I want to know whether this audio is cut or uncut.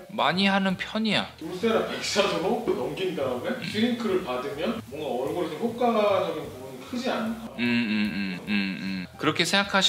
cut